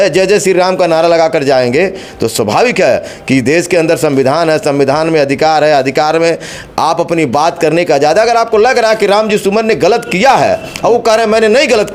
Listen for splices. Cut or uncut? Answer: uncut